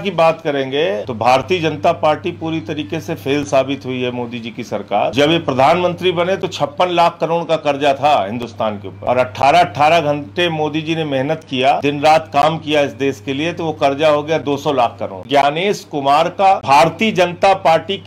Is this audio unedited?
no; 6 cuts; at 1.1 s, 5.1 s, 8.9 s, 11.8 s, 15.2 s, 16.6 s

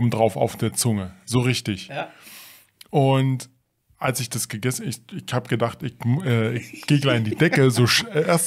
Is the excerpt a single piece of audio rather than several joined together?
yes; 0 cuts

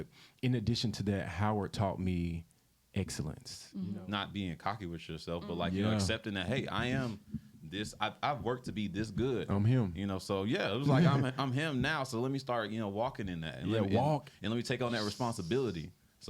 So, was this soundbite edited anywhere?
yes; 1 cut; at 3.9 s

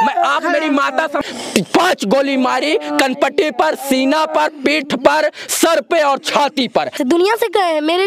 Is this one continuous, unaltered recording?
no; 2 cuts; at 1.2 s, 7.0 s

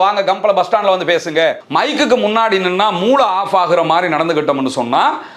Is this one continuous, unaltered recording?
no; 1 cut; at 1.6 s

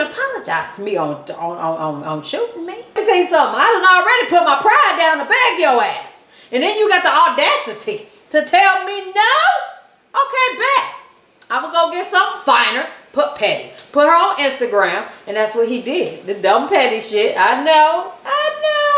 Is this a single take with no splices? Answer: no; 1 cut; at 3.0 s

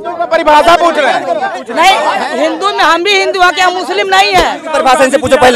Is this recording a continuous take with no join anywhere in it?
no; 2 cuts; at 1.6 s, 4.6 s

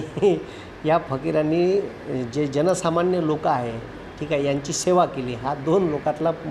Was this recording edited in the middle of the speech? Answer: no; 0 cuts

